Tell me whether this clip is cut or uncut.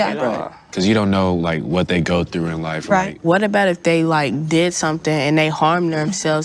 cut